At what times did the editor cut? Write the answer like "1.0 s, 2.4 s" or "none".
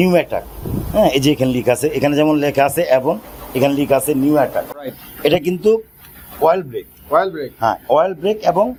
none